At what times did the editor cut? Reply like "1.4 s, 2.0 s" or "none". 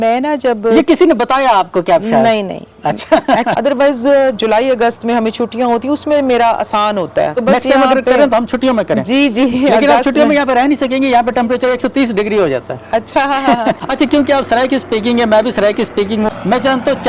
3.5 s, 7.3 s, 13.8 s, 16.3 s